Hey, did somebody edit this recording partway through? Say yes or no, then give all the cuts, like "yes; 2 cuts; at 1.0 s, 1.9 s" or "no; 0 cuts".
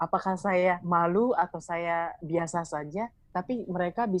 yes; 3 cuts; at 0.8 s, 2.2 s, 3.2 s